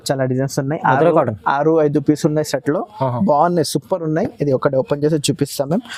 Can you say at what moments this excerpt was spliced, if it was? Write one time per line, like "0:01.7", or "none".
none